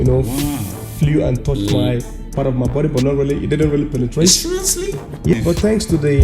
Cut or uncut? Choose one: cut